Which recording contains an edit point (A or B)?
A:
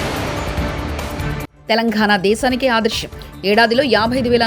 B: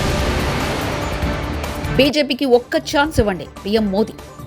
A